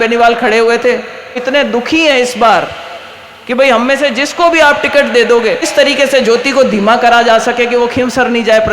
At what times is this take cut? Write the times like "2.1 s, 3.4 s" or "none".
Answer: 1.4 s, 5.6 s